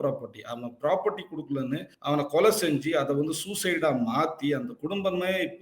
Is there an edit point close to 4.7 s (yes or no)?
no